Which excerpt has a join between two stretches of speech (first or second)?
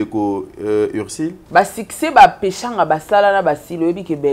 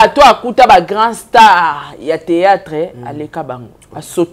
first